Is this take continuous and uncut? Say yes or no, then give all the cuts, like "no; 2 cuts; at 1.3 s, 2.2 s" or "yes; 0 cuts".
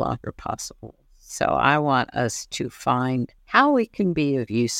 no; 1 cut; at 3.4 s